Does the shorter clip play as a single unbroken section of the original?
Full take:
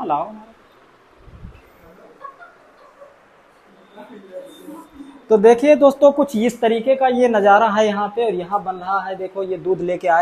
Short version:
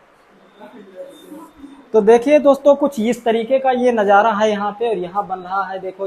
yes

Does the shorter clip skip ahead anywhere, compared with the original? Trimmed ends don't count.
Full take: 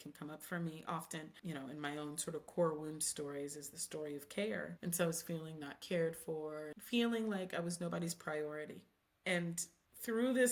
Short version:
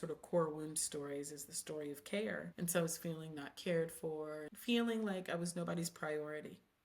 no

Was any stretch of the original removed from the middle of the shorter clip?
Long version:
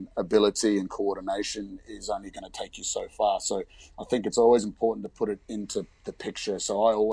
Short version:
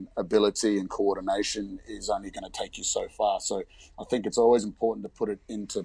no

